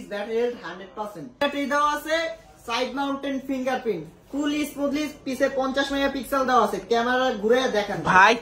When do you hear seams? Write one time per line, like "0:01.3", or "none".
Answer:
0:01.3